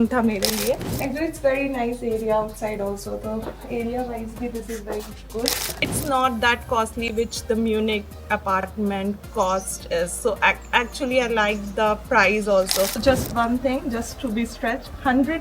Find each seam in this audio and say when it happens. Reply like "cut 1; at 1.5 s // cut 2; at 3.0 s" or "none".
cut 1; at 0.9 s // cut 2; at 6.0 s // cut 3; at 13.0 s